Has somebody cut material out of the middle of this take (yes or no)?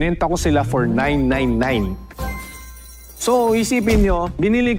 no